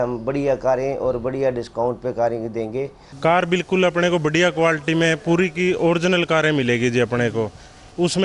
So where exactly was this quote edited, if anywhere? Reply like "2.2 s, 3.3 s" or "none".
3.0 s